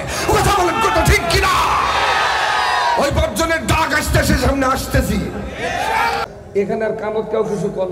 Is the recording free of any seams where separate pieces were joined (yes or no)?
no